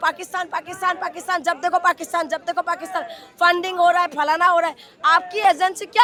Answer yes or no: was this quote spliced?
no